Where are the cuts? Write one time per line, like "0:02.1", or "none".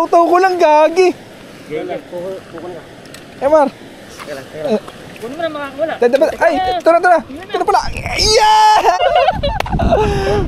0:09.0